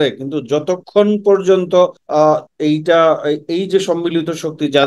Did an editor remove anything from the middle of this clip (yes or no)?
yes